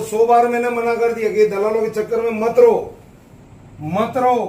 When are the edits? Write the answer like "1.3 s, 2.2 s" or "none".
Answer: none